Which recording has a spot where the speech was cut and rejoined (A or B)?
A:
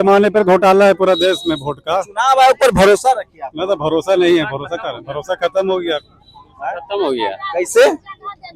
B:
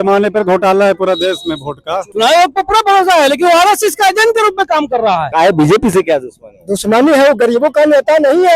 B